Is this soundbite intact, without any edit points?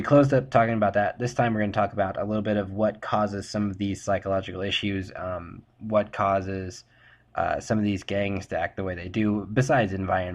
no; 1 cut; at 5.6 s

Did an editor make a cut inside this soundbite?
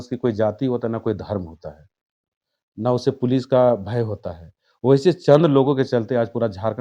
no; 0 cuts

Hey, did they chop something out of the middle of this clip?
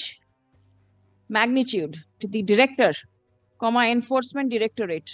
yes; 1 cut; at 2.2 s

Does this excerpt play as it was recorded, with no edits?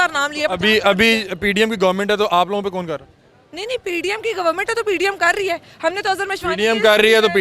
yes; 0 cuts

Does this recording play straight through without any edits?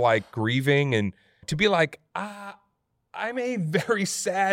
no; 1 cut; at 1.5 s

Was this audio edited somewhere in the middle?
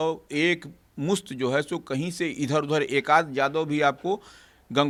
no; 0 cuts

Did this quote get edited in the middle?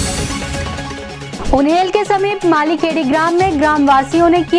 no; 0 cuts

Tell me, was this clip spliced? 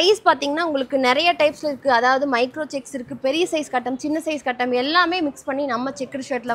no; 0 cuts

